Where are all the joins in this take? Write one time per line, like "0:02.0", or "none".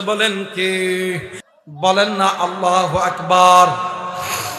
0:01.4